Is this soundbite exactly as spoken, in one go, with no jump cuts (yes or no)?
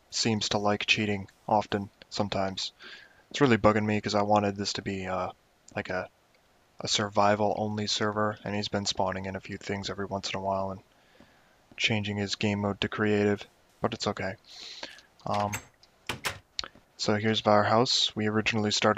no